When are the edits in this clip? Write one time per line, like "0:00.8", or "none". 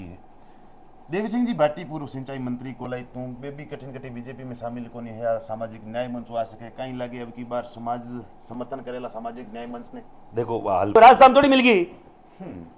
none